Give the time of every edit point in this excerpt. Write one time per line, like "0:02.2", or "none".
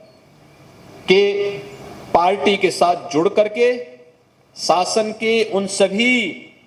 none

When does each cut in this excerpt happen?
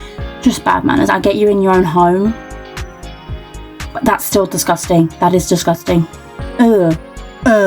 0:06.3

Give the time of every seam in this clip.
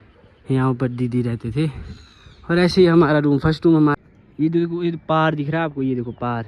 0:04.0

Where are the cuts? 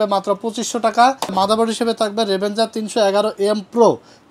0:01.3

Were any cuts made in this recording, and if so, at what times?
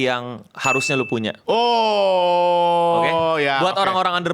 0:01.4

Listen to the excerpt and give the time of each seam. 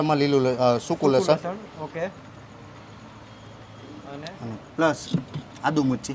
none

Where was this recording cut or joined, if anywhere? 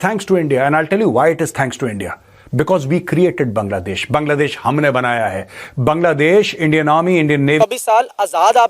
0:07.6

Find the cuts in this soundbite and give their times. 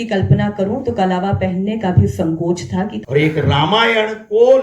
0:03.0

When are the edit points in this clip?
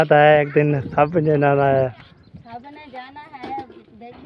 0:02.6

